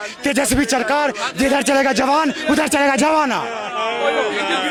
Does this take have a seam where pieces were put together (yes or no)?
no